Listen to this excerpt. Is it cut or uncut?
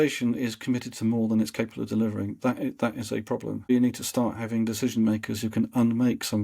cut